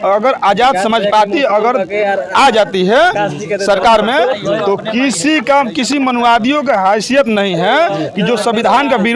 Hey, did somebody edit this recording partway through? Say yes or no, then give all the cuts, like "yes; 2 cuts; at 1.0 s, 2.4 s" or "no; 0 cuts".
no; 0 cuts